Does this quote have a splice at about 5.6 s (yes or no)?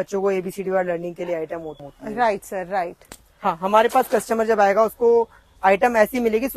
no